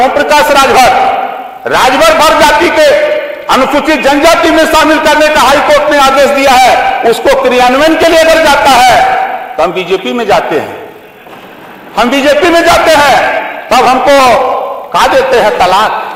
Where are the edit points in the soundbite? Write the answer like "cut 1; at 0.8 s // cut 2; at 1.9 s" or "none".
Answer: none